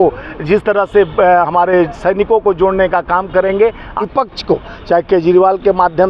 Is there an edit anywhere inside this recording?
yes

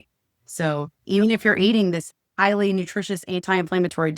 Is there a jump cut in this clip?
yes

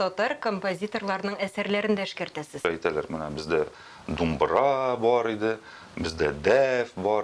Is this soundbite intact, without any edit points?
no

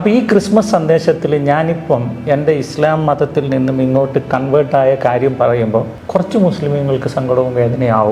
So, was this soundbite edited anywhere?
yes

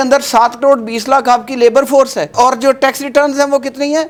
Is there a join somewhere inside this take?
no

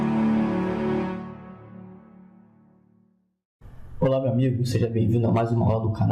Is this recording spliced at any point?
no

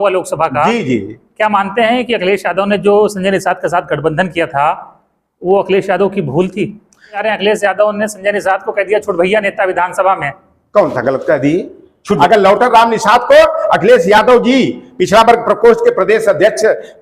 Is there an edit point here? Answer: yes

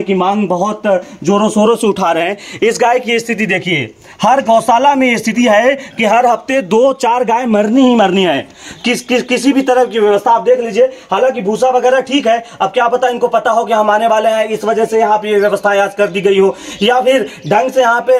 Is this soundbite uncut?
yes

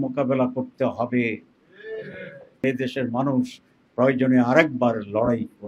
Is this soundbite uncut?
no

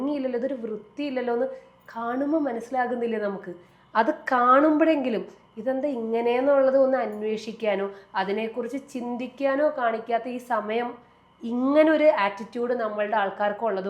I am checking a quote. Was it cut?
no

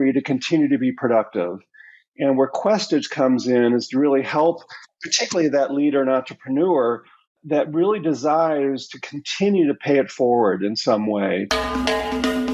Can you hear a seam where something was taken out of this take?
yes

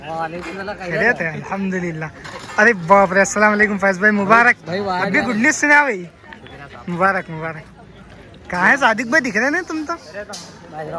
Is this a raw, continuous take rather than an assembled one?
yes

